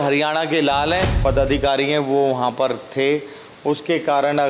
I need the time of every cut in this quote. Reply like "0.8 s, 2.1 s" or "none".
1.2 s